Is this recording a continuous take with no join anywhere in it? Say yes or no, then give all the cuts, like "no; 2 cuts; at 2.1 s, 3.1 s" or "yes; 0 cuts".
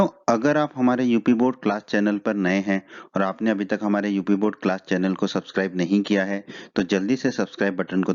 no; 1 cut; at 2.6 s